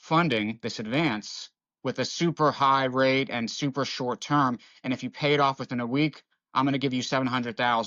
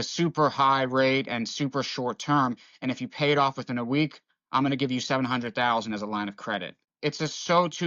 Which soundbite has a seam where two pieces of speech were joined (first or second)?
second